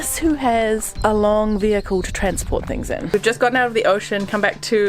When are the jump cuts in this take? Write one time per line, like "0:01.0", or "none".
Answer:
0:00.9
0:03.1